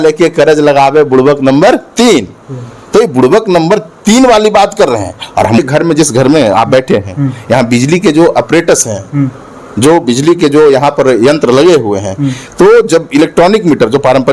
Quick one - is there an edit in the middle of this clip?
no; 0 cuts

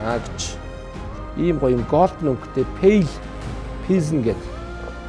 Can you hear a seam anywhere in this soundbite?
no; 0 cuts

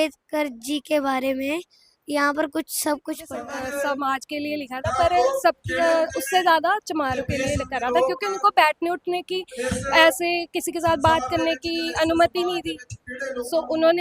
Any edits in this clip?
yes; 1 cut; at 3.4 s

